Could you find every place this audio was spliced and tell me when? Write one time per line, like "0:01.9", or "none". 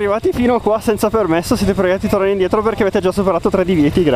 none